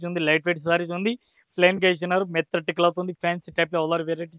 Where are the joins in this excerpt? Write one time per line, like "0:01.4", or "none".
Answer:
none